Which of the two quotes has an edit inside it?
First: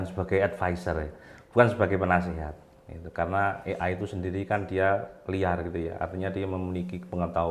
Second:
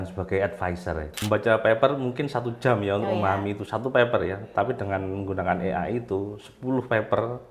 second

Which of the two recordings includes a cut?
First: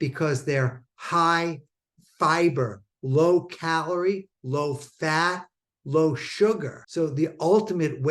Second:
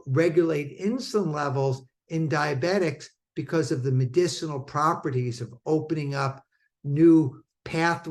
first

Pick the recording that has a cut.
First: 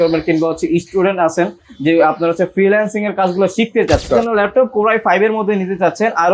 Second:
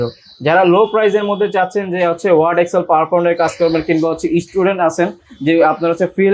first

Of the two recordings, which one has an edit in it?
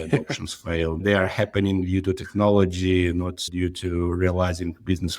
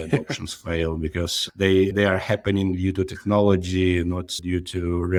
first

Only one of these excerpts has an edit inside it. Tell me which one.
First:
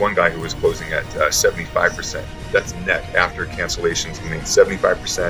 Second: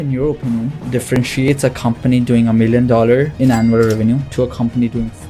second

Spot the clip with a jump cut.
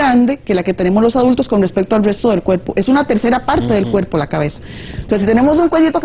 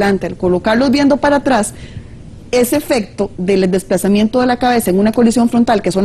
first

